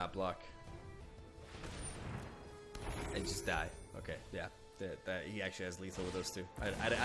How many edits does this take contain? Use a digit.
1